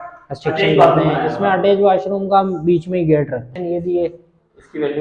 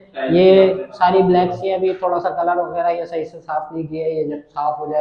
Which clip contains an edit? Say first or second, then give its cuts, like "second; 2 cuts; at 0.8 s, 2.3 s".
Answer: first; 1 cut; at 3.5 s